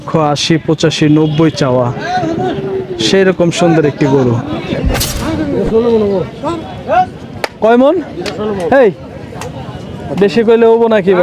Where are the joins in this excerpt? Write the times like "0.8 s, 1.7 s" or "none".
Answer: 4.7 s